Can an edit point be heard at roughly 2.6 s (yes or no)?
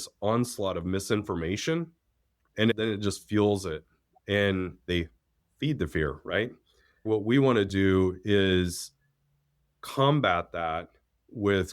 yes